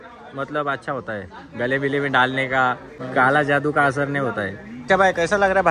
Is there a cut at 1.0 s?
no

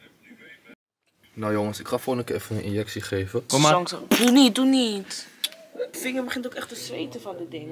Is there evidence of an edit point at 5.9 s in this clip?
yes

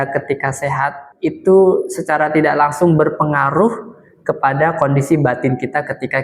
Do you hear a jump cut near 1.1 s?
yes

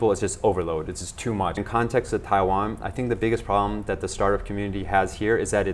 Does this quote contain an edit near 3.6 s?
no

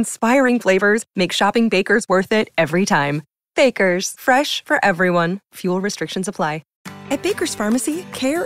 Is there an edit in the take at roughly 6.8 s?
yes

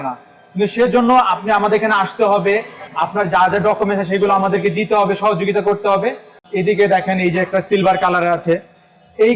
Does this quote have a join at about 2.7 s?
no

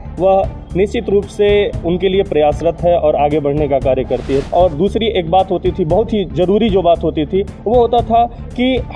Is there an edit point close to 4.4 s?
yes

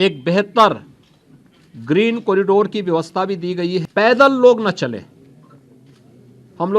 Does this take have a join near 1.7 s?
no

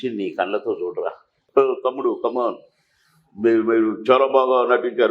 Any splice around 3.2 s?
no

